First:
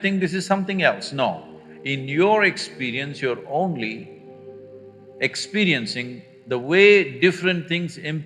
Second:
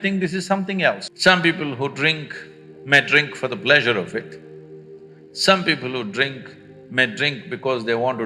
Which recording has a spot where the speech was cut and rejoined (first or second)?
second